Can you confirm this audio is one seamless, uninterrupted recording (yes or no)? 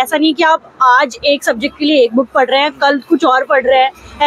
yes